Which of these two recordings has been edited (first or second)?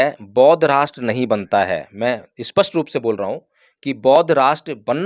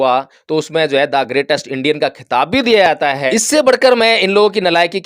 second